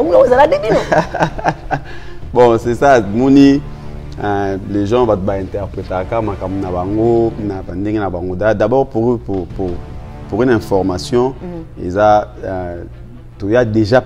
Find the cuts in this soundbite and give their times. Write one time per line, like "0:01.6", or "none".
none